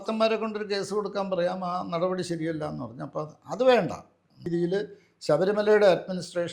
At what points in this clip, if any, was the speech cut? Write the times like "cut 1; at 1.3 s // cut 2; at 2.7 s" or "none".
cut 1; at 4.5 s